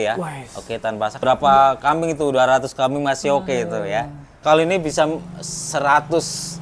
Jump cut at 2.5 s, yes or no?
no